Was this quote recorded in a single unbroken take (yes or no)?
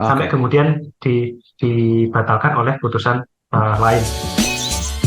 no